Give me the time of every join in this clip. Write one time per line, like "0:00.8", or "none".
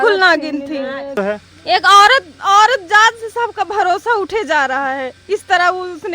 0:01.2